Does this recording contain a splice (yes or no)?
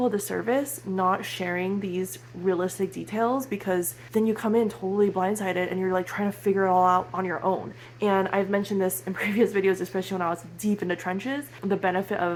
no